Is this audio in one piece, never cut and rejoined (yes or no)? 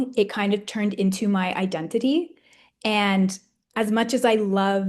yes